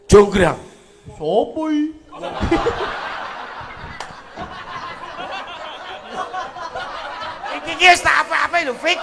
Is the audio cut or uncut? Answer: uncut